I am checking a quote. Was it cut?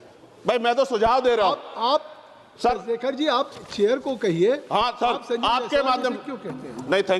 no; 0 cuts

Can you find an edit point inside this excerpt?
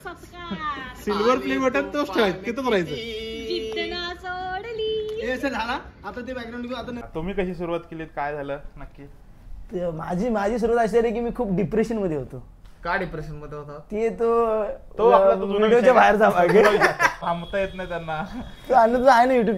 yes; 2 cuts; at 7.0 s, 17.2 s

